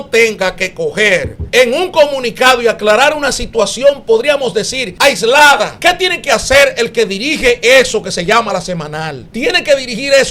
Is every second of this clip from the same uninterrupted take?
no; 4 cuts; at 1.4 s, 4.8 s, 5.7 s, 9.2 s

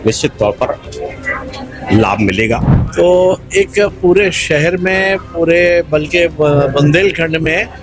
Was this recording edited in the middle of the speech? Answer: yes; 1 cut; at 2.8 s

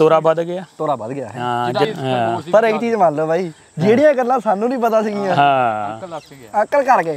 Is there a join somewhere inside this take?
yes; 1 cut; at 1.9 s

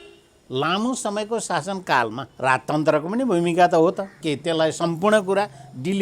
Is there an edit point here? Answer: yes; 2 cuts; at 2.2 s, 4.1 s

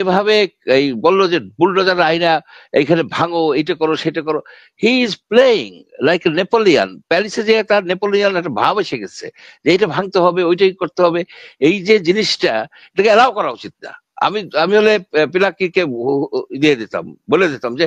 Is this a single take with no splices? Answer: yes; 0 cuts

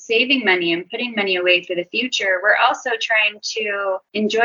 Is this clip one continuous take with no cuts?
yes; 0 cuts

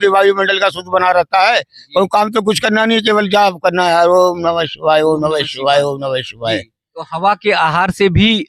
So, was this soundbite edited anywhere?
no; 0 cuts

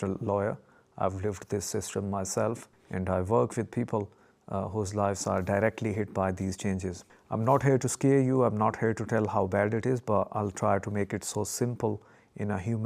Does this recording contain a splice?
yes; 2 cuts; at 2.7 s, 7.1 s

